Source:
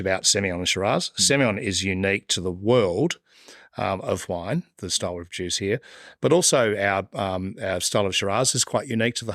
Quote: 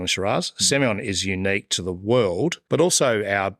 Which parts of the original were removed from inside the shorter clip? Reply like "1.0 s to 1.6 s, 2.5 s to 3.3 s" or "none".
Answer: 3.2 s to 6.1 s